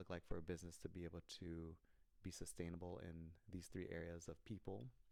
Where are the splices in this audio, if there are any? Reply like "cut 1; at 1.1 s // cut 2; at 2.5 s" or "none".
none